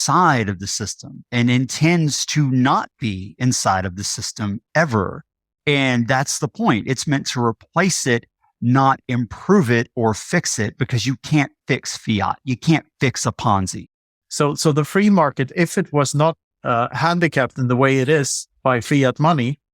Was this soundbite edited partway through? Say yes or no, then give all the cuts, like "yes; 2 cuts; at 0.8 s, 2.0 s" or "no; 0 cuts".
yes; 2 cuts; at 13.8 s, 16.5 s